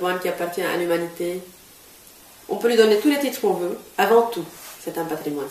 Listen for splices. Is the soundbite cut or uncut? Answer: cut